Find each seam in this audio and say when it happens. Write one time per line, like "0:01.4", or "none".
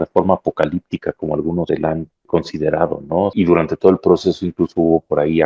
0:02.0
0:03.3